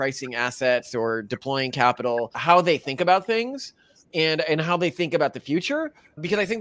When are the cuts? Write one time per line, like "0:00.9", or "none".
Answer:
0:02.3